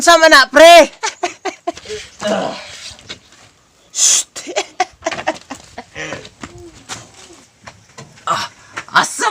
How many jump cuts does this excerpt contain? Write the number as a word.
two